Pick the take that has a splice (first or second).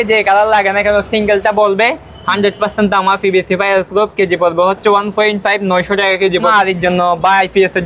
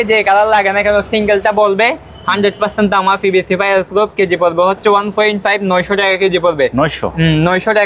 first